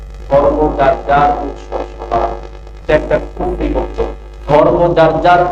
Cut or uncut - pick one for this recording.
cut